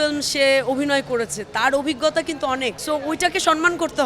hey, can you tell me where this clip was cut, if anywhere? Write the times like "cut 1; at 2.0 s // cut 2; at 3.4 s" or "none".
cut 1; at 2.8 s